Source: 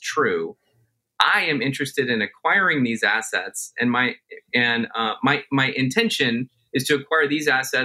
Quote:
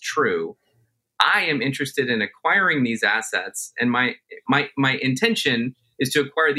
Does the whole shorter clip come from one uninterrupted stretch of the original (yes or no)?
no